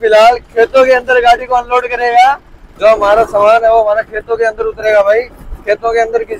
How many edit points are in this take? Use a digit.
0